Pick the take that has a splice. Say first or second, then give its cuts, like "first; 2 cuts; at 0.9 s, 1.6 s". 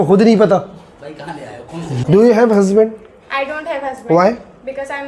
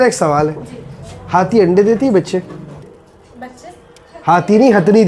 first; 1 cut; at 1.9 s